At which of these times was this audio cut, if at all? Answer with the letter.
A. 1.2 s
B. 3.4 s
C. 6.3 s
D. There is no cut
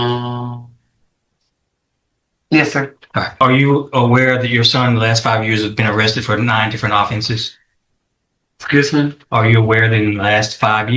B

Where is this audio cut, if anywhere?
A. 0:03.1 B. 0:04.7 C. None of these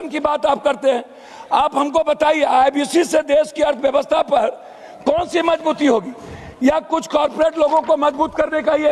C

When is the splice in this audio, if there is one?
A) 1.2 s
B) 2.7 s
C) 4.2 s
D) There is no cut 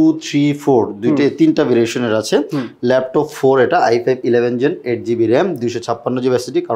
D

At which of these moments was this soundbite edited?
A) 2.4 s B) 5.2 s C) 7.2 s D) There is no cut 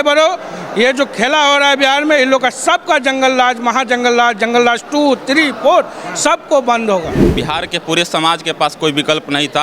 C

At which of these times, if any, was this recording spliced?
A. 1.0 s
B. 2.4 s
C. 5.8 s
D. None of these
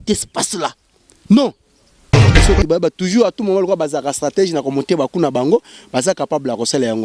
B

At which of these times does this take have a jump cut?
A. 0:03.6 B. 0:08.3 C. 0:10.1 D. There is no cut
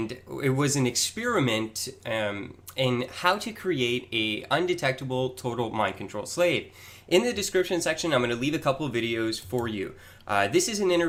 D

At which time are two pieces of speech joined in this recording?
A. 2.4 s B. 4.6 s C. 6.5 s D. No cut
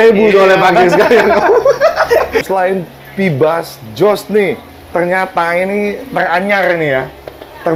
A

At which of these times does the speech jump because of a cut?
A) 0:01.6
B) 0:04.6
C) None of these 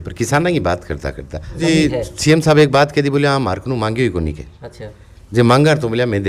A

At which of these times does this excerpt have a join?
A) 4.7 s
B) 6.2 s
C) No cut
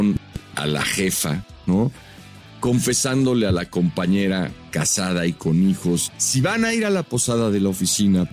B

